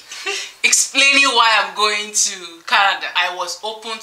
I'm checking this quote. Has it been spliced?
yes; 1 cut; at 3.0 s

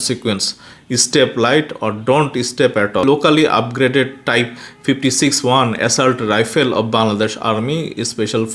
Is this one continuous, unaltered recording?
no; 1 cut; at 3.0 s

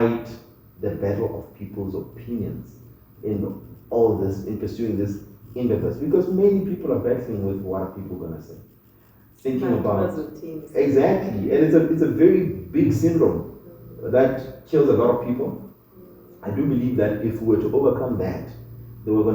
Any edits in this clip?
no; 0 cuts

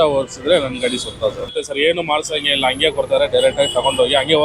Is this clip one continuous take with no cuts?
no; 1 cut; at 1.5 s

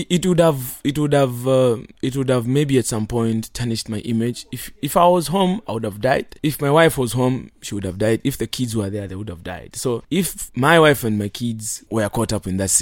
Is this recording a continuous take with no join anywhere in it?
no; 4 cuts; at 1.9 s, 6.3 s, 10.2 s, 11.7 s

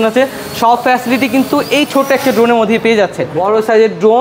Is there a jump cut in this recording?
yes; 1 cut; at 3.3 s

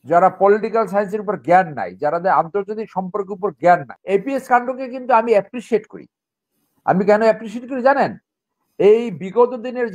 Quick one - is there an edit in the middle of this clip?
yes; 1 cut; at 3.9 s

